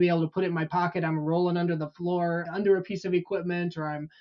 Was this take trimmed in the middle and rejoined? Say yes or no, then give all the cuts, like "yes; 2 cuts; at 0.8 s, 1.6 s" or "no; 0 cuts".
yes; 1 cut; at 2.4 s